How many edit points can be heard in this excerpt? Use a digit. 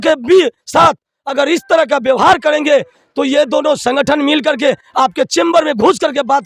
0